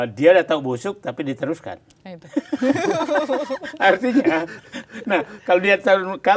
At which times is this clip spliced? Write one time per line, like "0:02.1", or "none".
none